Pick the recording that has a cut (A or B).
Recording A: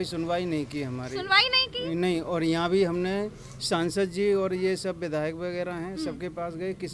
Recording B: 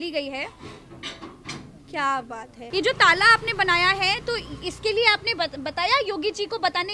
B